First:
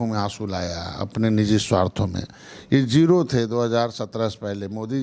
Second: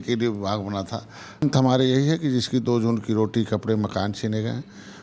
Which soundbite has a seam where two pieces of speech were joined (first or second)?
second